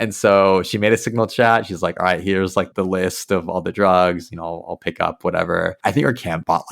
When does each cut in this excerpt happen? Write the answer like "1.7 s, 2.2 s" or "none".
5.7 s